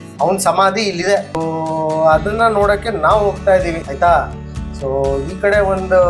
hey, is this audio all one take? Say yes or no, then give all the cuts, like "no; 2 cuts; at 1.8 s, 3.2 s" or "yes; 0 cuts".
no; 2 cuts; at 1.4 s, 3.9 s